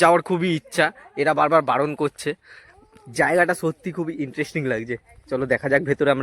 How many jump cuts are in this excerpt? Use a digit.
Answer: 0